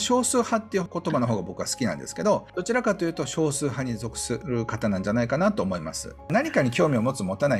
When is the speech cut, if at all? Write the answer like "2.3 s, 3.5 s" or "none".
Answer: 0.9 s, 2.5 s, 4.4 s, 6.3 s